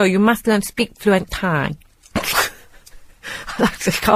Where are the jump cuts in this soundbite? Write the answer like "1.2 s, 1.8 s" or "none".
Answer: 1.9 s